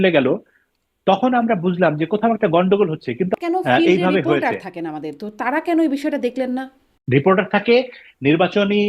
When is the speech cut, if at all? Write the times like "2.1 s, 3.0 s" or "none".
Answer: 3.3 s, 6.9 s